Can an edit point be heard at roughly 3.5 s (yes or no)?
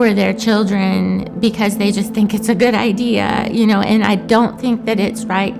yes